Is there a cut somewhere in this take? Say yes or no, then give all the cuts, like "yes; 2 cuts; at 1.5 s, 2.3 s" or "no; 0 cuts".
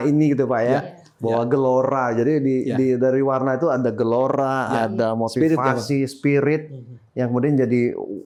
no; 0 cuts